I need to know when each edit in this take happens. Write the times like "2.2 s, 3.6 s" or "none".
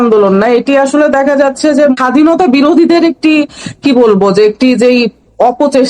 1.9 s